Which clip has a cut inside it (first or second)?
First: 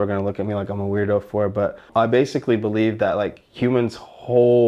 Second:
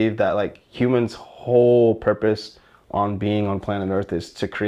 first